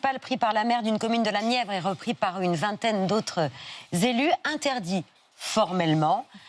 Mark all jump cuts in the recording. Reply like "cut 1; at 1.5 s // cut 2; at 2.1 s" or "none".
none